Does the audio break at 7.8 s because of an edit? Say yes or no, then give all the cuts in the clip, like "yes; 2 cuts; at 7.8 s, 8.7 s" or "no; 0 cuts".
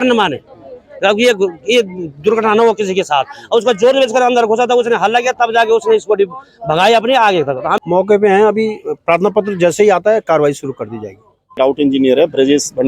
yes; 2 cuts; at 7.8 s, 11.5 s